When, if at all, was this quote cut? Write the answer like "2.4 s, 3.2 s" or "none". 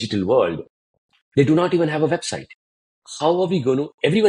none